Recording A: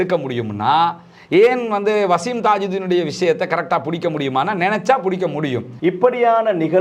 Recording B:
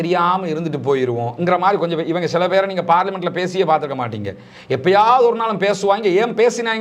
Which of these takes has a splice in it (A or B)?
A